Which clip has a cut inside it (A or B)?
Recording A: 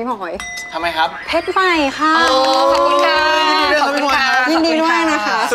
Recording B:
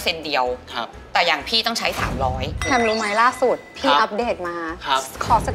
B